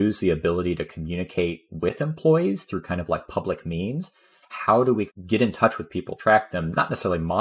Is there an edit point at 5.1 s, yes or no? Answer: yes